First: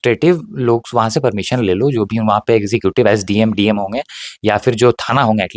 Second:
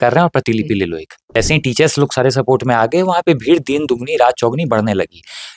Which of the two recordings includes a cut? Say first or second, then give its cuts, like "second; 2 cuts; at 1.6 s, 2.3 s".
second; 1 cut; at 1.3 s